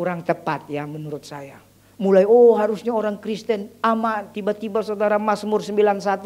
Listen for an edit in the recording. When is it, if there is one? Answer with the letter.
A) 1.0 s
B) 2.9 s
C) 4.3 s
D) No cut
C